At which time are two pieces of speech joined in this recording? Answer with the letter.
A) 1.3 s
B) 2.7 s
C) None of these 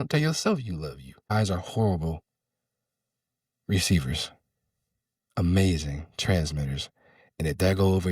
A